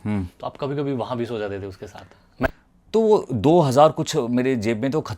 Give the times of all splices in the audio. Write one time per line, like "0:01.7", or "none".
0:02.5